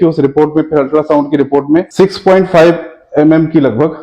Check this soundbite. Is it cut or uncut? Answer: cut